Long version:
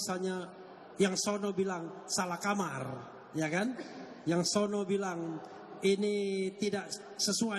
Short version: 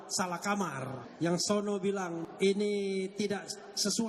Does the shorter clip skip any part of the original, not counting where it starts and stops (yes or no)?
yes